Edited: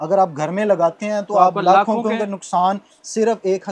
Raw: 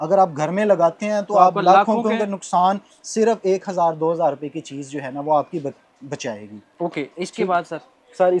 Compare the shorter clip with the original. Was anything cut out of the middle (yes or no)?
no